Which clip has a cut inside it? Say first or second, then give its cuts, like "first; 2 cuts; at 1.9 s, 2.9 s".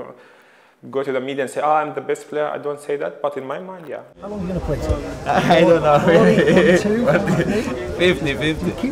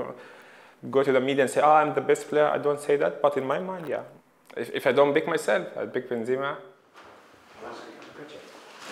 first; 1 cut; at 4.4 s